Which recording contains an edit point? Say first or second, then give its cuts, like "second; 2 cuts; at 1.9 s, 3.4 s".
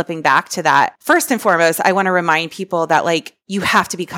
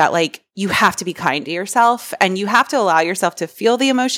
first; 1 cut; at 0.9 s